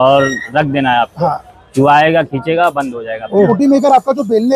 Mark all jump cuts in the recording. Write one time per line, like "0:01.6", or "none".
0:03.5